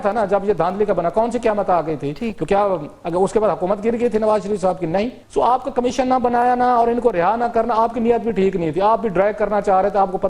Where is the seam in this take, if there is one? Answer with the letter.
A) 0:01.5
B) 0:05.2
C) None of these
B